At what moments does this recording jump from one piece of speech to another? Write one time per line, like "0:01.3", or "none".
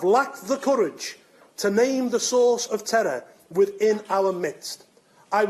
0:02.4